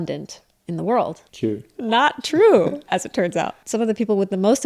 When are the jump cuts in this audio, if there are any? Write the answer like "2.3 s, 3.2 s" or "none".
1.2 s, 3.6 s